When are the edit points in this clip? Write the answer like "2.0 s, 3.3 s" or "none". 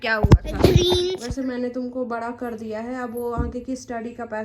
1.1 s